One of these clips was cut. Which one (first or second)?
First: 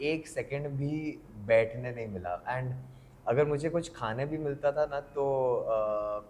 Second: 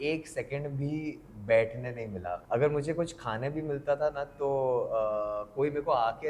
second